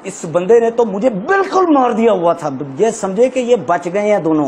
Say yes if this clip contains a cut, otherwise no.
no